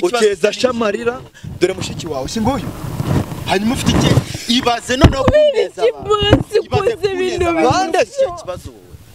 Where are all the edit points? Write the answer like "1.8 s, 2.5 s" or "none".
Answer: none